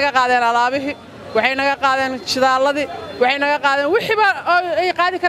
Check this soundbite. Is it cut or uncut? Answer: uncut